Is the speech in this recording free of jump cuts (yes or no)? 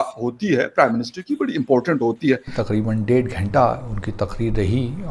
no